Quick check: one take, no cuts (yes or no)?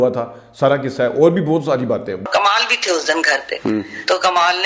no